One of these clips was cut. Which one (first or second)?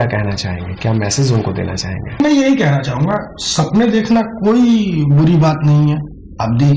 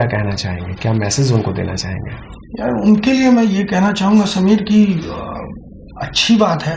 first